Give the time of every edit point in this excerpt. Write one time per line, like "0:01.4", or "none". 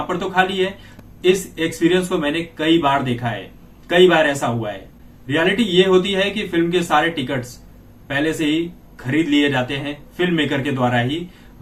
none